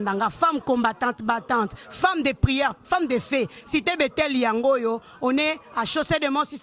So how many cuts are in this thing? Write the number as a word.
zero